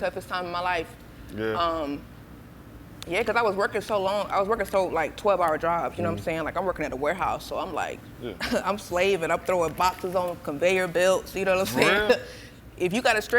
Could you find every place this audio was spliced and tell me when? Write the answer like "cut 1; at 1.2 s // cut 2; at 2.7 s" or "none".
cut 1; at 8.1 s